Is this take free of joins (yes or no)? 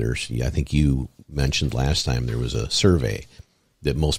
yes